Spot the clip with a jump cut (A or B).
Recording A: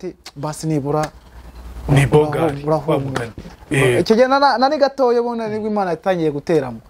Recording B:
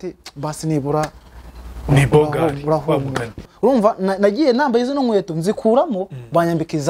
B